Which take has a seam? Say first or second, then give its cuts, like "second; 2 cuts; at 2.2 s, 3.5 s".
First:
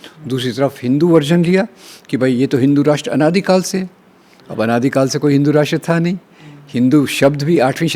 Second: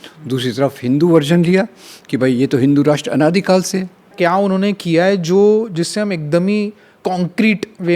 second; 1 cut; at 4.1 s